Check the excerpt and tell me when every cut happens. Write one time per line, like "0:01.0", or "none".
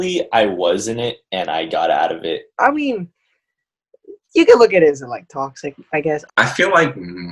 0:02.5
0:06.2